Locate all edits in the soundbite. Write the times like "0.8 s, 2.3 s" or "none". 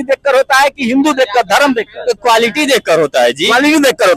none